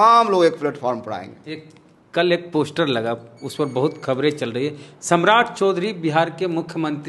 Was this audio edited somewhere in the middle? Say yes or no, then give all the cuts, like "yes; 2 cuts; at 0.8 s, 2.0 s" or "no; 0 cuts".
no; 0 cuts